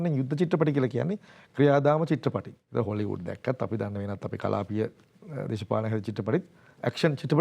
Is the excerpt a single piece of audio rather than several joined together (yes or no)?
no